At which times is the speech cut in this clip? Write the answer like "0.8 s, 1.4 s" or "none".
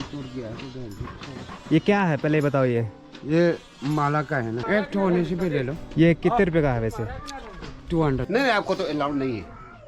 4.6 s, 8.2 s